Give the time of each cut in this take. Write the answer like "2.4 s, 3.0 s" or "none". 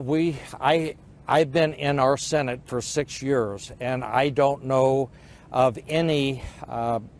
5.6 s